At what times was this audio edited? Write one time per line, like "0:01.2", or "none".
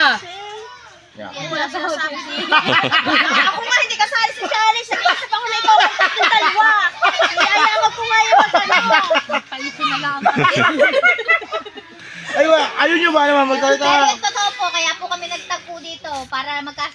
none